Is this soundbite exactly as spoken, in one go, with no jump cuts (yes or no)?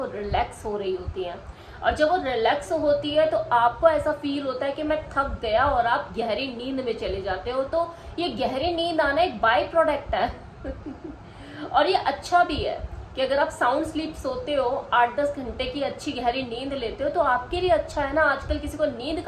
yes